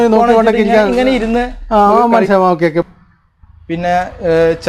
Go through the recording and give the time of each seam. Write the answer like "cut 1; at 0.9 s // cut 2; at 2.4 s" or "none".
cut 1; at 2.8 s

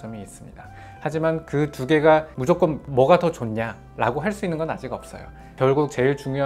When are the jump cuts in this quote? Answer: cut 1; at 5.5 s

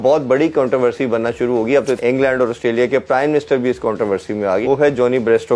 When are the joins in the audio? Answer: cut 1; at 2.0 s // cut 2; at 4.6 s

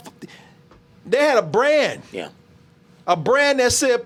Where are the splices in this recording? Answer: none

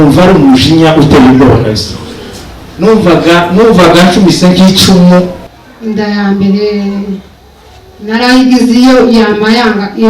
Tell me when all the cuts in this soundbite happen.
cut 1; at 5.4 s

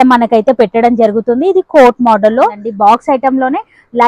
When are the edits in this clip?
cut 1; at 2.6 s

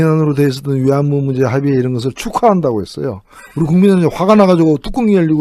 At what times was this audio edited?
cut 1; at 2.1 s

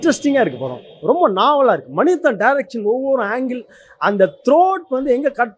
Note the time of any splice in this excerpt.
none

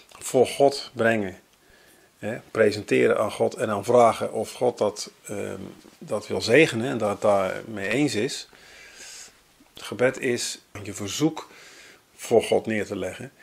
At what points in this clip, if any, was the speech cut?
cut 1; at 10.8 s

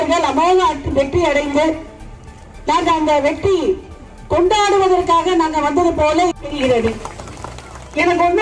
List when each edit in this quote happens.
cut 1; at 6.4 s

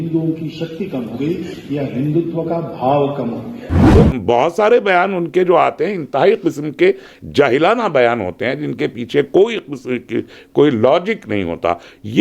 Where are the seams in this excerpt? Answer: cut 1; at 3.7 s

